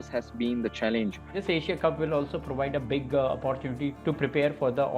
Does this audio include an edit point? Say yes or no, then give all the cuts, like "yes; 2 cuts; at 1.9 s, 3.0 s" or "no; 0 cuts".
yes; 1 cut; at 1.3 s